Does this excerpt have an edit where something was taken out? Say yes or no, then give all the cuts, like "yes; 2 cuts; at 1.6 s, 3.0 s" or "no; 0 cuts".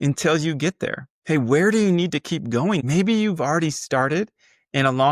yes; 2 cuts; at 1.1 s, 2.8 s